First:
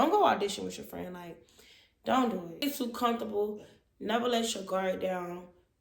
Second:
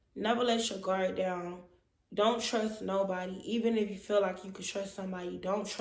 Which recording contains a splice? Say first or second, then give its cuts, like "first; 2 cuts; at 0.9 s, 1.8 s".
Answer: first; 1 cut; at 2.6 s